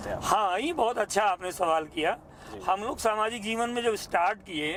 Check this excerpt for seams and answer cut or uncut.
uncut